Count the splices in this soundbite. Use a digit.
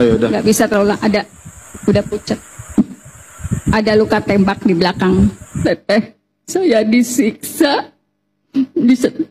2